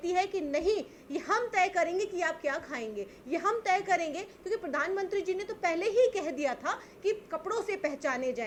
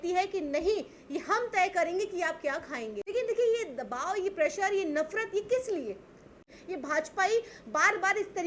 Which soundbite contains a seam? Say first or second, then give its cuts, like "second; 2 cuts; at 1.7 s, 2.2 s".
second; 2 cuts; at 2.9 s, 6.5 s